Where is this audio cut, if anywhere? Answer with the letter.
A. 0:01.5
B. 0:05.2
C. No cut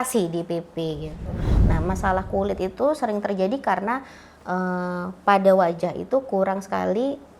A